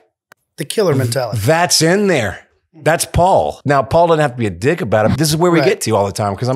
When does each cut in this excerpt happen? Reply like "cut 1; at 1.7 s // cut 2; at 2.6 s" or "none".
cut 1; at 3.6 s // cut 2; at 5.1 s